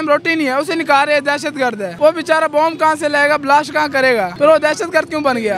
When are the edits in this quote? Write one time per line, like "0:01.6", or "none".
0:01.9
0:04.3